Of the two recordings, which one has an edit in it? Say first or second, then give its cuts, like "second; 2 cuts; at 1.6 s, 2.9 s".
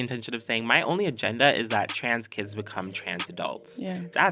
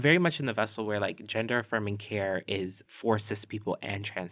second; 1 cut; at 2.8 s